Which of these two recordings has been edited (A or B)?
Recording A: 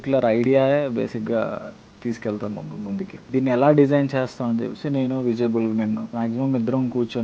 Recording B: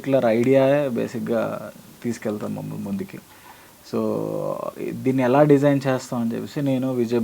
A